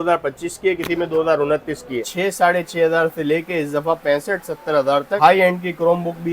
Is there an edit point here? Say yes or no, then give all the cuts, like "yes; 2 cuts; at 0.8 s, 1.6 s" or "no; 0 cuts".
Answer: yes; 2 cuts; at 2.0 s, 5.2 s